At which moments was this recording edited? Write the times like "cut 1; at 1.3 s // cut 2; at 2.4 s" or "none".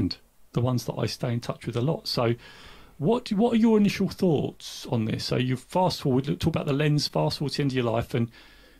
none